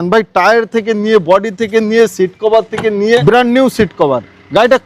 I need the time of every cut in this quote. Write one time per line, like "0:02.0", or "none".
0:03.2